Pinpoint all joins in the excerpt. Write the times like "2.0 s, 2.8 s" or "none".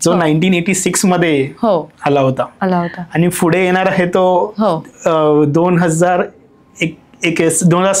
none